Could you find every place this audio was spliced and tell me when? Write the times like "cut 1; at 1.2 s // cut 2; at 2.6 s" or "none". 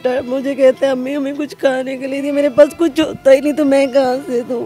none

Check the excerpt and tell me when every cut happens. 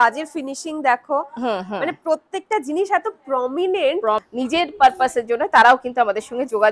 cut 1; at 4.2 s

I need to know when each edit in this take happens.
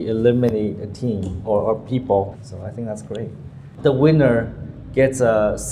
cut 1; at 2.5 s // cut 2; at 3.8 s

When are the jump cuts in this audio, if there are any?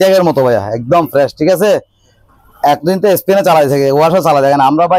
none

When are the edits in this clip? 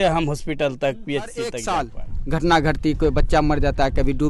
cut 1; at 1.6 s

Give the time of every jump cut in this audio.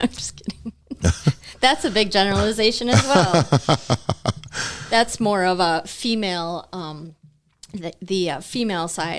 none

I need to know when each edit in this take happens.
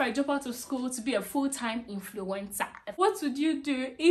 cut 1; at 2.8 s

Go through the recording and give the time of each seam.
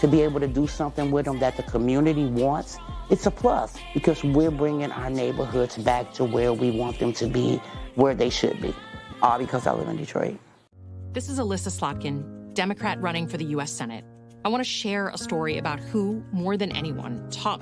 cut 1; at 11.1 s

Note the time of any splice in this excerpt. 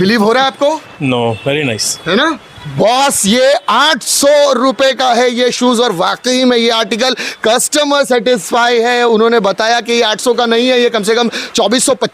none

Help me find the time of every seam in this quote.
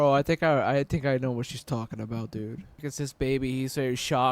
cut 1; at 2.8 s

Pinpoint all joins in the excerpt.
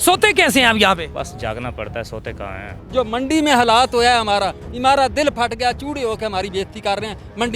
cut 1; at 1.1 s // cut 2; at 2.7 s

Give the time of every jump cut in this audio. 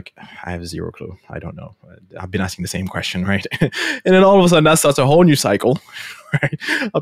none

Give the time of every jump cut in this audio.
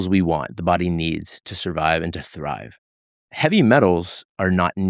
cut 1; at 1.4 s

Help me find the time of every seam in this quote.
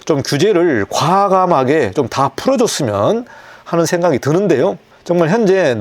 none

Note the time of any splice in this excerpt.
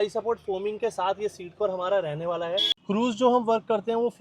cut 1; at 2.7 s

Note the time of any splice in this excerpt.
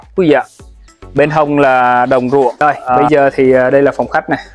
cut 1; at 2.8 s

